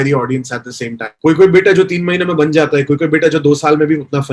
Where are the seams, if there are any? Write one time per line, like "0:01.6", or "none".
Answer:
0:01.0